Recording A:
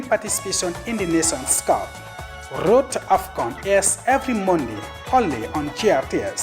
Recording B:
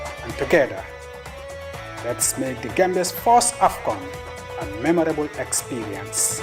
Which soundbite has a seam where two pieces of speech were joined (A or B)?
A